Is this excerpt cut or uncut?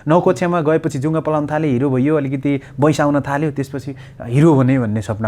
uncut